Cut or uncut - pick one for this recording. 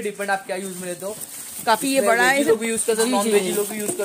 uncut